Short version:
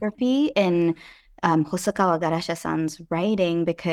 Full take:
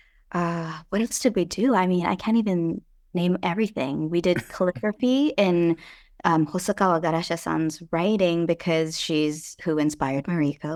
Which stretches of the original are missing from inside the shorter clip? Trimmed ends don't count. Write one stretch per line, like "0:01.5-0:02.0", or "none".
none